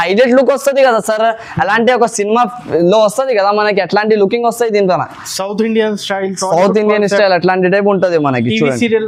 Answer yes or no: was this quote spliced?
no